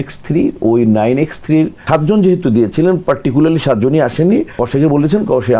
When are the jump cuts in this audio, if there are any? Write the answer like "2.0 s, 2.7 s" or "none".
1.8 s, 4.6 s